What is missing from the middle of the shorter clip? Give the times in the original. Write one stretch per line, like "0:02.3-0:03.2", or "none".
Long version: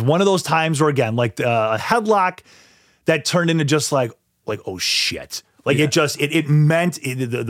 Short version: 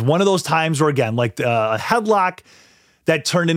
none